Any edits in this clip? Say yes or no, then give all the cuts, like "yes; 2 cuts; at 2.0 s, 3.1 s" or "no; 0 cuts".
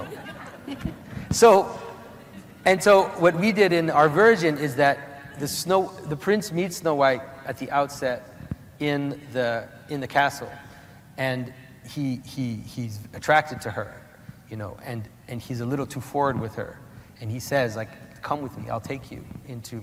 no; 0 cuts